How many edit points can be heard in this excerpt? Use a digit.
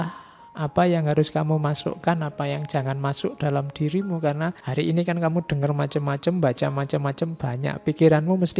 1